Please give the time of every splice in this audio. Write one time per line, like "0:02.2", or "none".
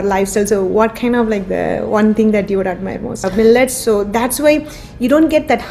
0:03.4